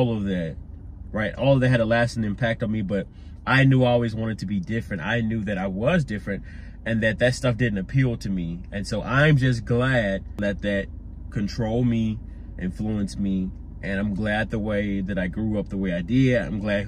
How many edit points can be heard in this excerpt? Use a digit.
1